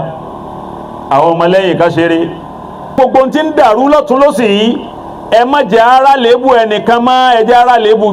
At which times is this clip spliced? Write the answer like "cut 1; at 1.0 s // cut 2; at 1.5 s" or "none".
cut 1; at 3.0 s